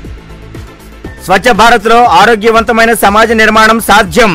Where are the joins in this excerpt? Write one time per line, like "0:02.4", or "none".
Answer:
0:01.1

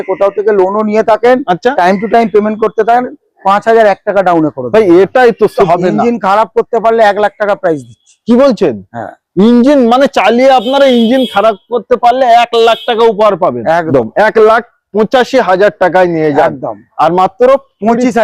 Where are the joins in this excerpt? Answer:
0:05.6
0:13.9

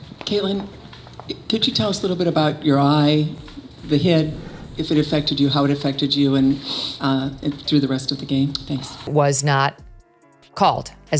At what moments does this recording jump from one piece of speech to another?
0:09.1

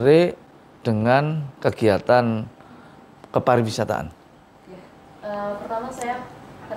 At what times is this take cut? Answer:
0:01.5

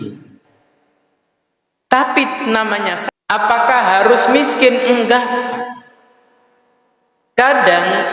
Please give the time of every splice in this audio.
0:03.0

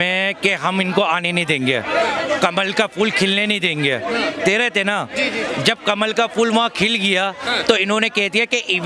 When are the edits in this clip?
none

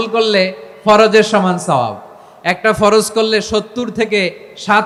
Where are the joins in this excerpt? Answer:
none

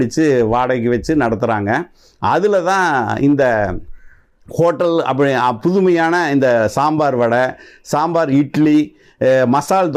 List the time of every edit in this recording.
none

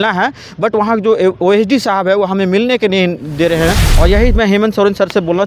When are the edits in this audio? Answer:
0:03.9

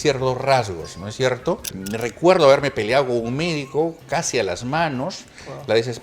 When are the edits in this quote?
0:01.8

